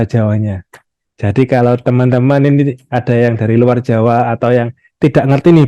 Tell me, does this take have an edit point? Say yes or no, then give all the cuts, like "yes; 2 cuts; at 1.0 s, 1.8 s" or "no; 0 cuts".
no; 0 cuts